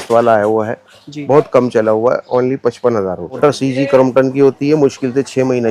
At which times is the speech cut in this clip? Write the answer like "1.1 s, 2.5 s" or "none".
3.4 s